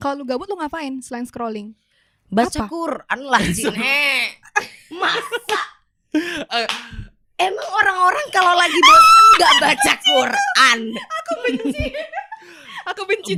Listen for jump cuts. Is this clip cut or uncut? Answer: uncut